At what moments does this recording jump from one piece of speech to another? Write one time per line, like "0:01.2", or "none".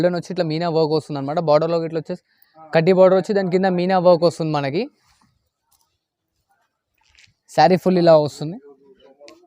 none